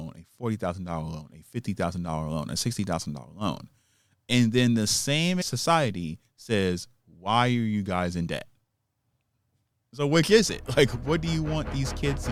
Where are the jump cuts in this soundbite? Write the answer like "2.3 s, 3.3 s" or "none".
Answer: none